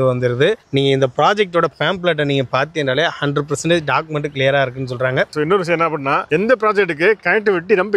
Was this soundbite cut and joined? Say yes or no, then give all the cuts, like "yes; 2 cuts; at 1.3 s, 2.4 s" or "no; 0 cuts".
yes; 1 cut; at 5.3 s